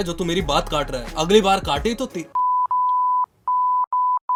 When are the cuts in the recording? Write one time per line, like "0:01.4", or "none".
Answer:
none